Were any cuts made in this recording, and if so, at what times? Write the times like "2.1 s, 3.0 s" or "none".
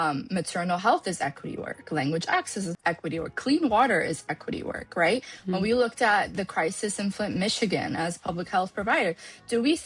2.7 s